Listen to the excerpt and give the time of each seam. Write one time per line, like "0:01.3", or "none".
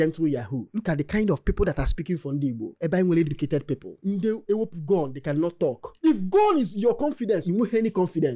none